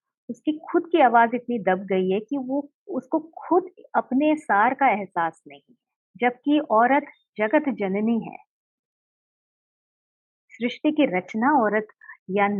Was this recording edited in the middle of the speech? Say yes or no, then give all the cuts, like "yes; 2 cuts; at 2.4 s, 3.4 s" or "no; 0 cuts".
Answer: no; 0 cuts